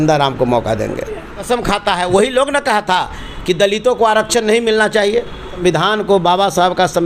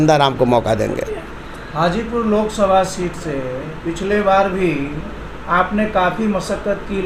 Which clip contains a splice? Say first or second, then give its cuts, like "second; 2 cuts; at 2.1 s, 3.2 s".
first; 2 cuts; at 1.5 s, 5.5 s